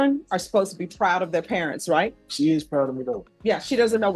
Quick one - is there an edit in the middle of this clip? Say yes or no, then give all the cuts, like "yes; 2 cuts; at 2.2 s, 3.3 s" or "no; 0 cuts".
yes; 2 cuts; at 2.2 s, 3.2 s